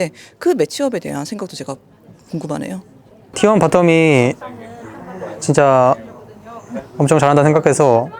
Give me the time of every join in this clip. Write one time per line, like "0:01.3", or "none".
0:03.4